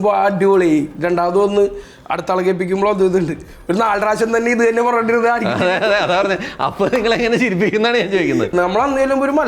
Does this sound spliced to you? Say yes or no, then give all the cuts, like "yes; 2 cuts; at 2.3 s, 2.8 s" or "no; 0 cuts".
yes; 1 cut; at 8.5 s